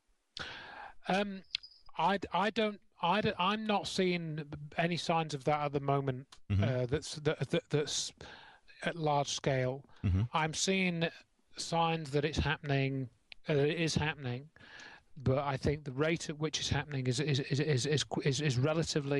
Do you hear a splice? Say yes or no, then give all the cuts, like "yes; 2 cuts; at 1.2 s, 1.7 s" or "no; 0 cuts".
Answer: yes; 1 cut; at 18.1 s